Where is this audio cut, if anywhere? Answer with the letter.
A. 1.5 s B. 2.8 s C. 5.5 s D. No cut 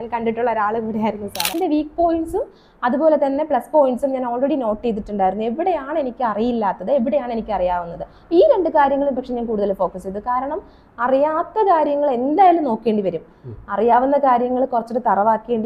A